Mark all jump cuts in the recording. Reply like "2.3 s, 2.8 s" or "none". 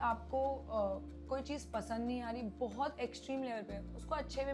none